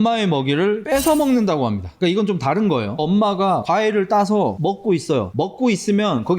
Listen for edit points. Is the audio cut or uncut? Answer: cut